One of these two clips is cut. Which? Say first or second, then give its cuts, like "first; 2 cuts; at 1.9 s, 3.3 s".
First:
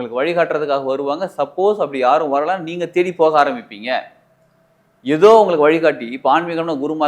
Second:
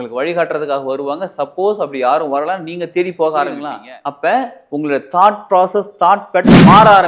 second; 1 cut; at 3.7 s